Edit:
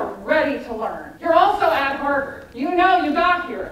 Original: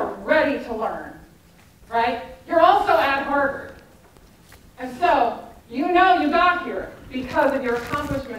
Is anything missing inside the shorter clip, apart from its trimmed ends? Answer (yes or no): yes